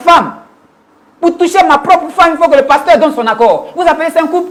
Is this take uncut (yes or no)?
yes